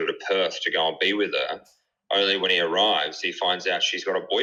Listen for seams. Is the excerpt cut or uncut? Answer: uncut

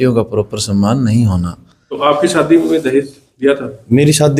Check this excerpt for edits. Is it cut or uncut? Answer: cut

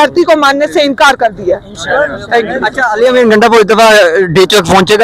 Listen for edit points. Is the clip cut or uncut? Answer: uncut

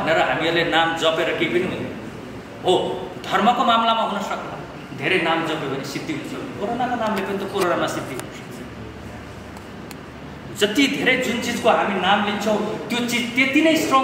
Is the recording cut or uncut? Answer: uncut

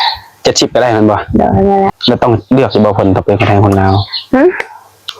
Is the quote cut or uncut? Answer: cut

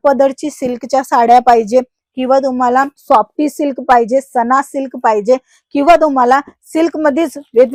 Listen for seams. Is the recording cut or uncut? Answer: uncut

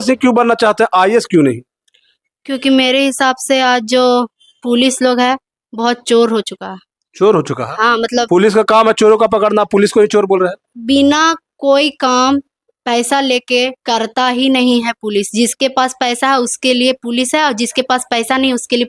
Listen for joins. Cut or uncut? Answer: uncut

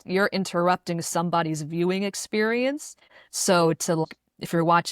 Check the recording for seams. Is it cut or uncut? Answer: cut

